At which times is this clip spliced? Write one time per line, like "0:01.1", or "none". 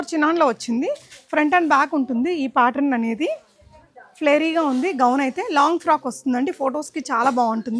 none